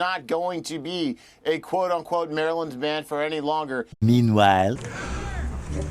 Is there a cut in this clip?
yes; 2 cuts; at 3.9 s, 4.9 s

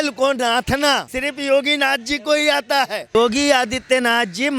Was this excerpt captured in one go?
no; 2 cuts; at 1.1 s, 3.1 s

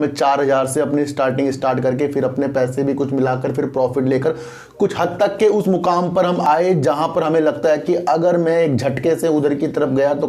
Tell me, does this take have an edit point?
no; 0 cuts

